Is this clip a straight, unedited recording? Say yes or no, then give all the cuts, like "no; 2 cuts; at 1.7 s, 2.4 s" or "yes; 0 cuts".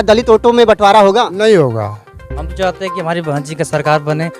no; 1 cut; at 2.2 s